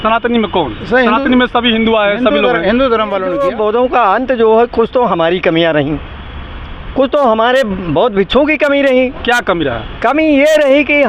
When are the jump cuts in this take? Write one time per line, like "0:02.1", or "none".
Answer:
0:03.3